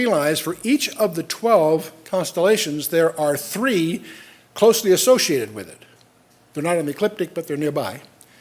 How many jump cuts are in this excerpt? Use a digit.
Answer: 0